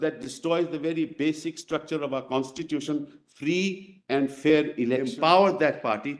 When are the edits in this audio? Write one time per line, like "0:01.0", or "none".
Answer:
0:05.1

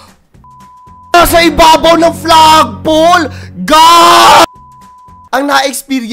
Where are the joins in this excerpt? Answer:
0:05.2

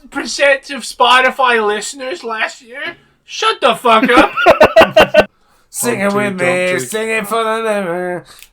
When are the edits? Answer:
0:05.3

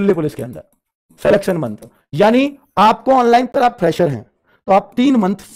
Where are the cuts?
0:03.5

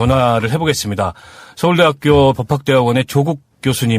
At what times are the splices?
0:02.6

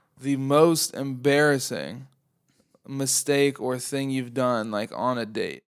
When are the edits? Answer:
none

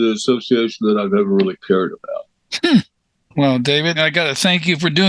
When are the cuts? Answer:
0:03.0
0:04.0

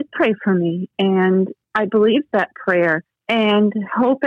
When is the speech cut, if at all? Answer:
0:01.6
0:03.1

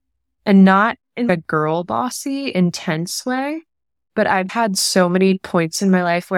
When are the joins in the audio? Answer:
0:04.5

